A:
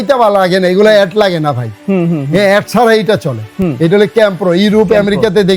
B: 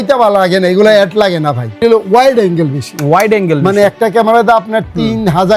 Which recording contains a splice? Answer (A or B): B